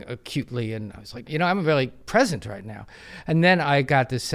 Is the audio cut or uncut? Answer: cut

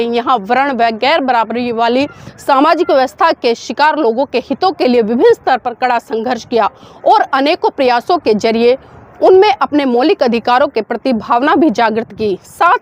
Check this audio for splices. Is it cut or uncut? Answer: uncut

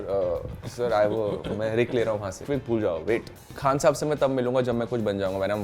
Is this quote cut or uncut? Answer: cut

